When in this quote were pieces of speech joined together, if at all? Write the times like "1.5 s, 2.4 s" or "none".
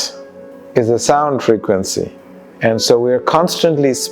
none